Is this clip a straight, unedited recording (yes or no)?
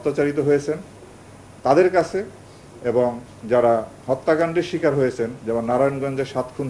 yes